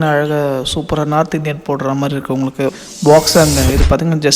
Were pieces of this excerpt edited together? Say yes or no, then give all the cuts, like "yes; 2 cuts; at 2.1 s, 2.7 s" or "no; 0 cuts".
yes; 1 cut; at 2.7 s